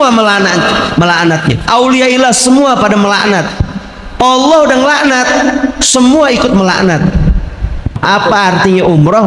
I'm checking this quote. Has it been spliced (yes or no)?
yes